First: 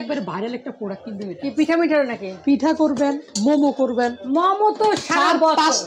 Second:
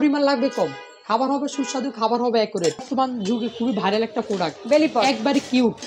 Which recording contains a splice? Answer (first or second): second